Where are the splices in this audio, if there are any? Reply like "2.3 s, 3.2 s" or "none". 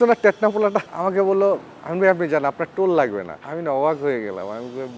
0.9 s